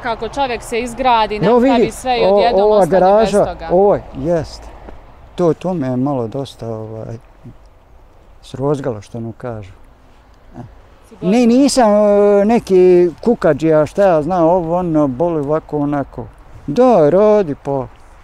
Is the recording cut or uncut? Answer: cut